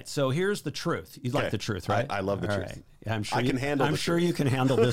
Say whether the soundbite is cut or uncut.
uncut